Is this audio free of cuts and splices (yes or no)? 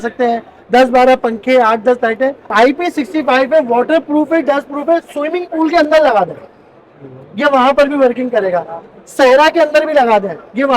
no